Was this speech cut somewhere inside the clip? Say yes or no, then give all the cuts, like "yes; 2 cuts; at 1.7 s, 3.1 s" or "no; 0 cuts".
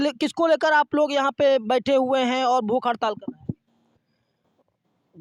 no; 0 cuts